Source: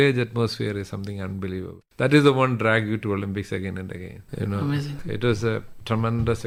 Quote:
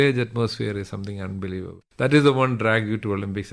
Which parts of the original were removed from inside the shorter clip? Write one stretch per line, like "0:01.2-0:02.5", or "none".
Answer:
none